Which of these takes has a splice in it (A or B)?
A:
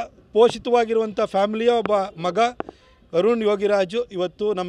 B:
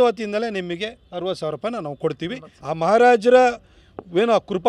B